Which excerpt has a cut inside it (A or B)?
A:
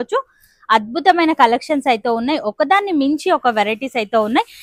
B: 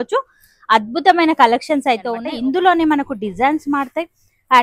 B